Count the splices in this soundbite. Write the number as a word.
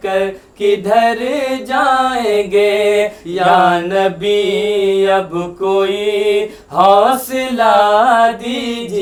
zero